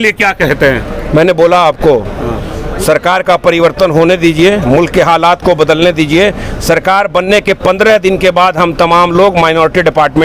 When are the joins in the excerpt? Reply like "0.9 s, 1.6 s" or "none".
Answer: none